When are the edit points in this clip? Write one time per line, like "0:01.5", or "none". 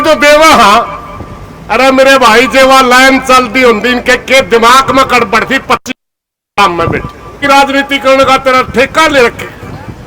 0:07.4